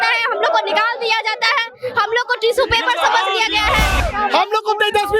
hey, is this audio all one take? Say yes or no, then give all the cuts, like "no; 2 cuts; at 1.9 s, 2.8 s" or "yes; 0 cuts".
no; 1 cut; at 4.0 s